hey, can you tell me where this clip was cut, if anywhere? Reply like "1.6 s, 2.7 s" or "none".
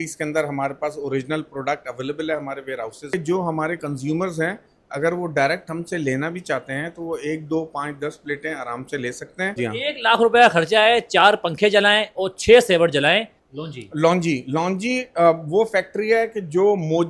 3.1 s, 9.5 s, 13.3 s